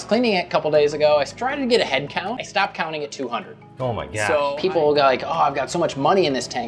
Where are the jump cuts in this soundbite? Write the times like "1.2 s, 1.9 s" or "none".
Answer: 2.4 s, 4.5 s